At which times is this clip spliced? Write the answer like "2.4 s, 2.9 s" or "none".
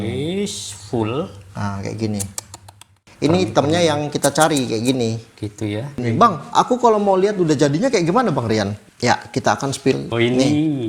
3.0 s, 6.0 s, 8.8 s, 10.0 s